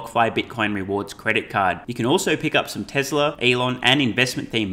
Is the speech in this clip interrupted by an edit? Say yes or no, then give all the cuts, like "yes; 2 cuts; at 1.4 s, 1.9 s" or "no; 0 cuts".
yes; 1 cut; at 3.4 s